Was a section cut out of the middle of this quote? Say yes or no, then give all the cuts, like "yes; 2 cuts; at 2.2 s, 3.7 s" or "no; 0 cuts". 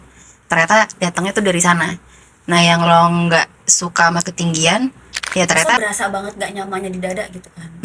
yes; 1 cut; at 5.8 s